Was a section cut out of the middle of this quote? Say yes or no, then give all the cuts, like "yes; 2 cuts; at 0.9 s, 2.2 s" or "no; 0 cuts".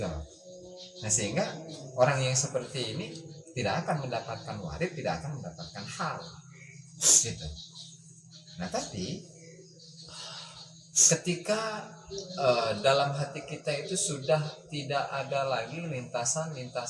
no; 0 cuts